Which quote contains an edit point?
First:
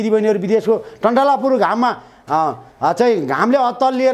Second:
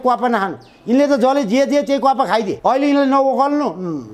second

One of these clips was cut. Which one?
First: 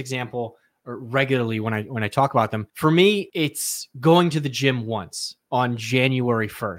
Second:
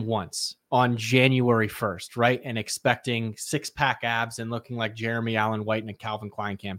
first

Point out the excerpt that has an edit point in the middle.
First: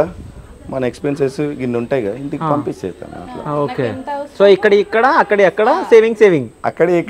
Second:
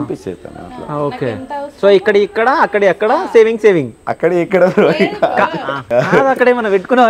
second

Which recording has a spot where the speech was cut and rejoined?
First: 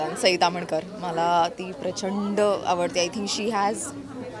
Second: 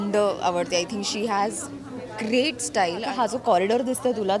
second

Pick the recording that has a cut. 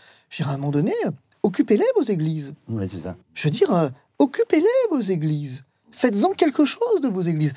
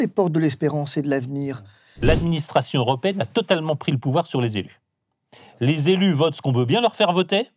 second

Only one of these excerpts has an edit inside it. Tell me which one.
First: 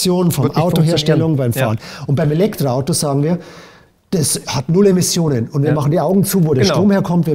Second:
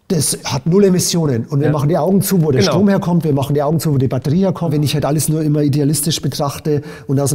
second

